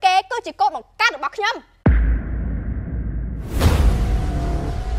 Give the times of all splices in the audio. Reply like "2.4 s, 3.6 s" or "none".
1.8 s